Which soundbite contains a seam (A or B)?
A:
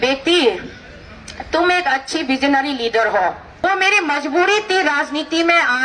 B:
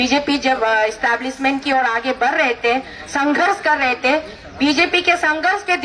A